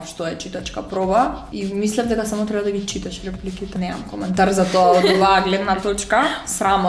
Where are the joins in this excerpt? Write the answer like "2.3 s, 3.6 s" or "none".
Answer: 1.5 s, 3.8 s